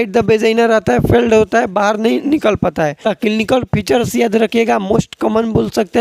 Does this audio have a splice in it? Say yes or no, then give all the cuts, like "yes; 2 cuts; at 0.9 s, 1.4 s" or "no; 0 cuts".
yes; 1 cut; at 3.0 s